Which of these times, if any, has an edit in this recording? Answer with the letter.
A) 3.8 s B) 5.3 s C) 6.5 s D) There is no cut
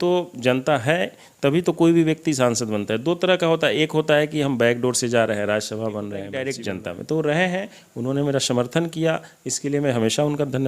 C